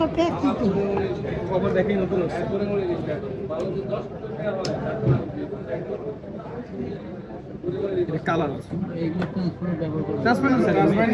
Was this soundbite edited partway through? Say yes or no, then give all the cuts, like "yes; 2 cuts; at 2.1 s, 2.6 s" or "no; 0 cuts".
no; 0 cuts